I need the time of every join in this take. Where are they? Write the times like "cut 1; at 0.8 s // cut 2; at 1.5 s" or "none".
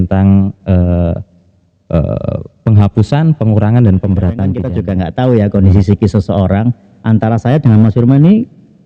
cut 1; at 4.7 s

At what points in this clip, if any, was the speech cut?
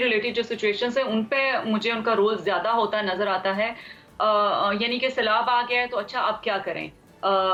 none

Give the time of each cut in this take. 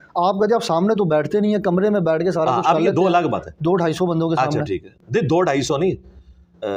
none

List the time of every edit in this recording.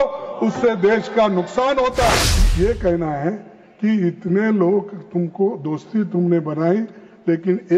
cut 1; at 2.3 s

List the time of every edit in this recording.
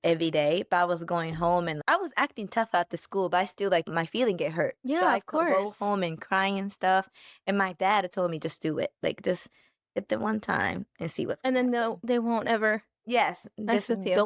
none

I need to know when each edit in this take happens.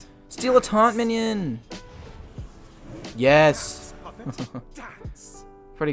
none

